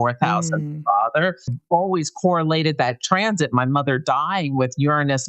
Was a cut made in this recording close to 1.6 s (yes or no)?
yes